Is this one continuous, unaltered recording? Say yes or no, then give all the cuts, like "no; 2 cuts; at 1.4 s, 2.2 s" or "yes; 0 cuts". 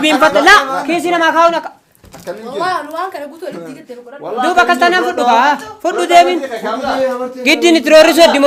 yes; 0 cuts